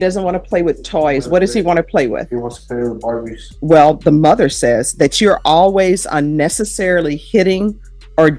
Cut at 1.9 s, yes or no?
no